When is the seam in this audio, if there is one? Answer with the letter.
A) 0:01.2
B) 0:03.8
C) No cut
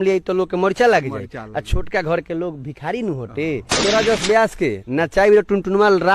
B